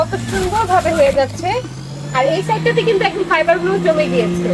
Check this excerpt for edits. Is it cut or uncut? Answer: uncut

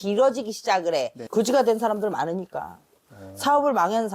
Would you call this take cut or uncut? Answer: cut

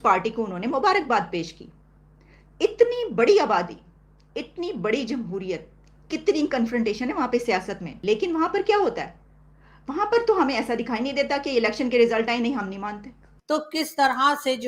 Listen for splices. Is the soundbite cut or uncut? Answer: cut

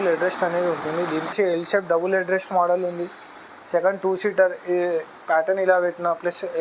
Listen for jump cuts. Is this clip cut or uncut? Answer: cut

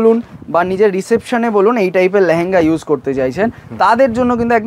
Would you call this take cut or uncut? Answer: uncut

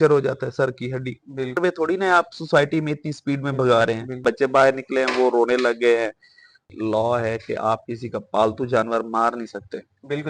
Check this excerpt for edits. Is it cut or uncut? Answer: cut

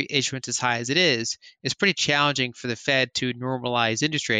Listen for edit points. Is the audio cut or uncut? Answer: uncut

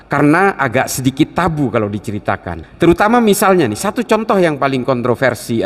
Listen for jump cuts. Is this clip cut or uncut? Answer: cut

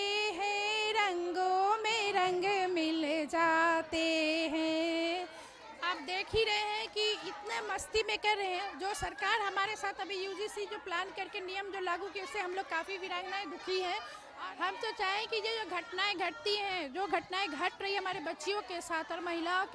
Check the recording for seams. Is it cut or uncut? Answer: cut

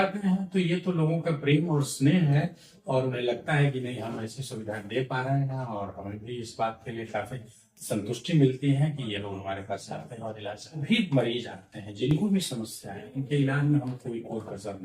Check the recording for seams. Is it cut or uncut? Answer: cut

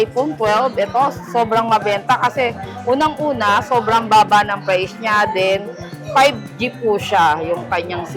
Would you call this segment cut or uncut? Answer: uncut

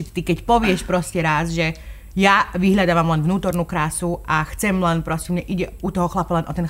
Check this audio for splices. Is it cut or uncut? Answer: uncut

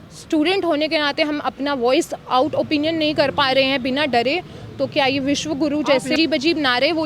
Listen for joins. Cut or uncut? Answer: cut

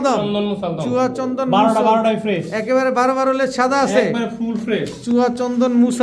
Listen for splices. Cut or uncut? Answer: uncut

